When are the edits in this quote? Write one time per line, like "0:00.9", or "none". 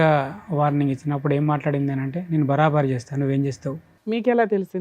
0:03.9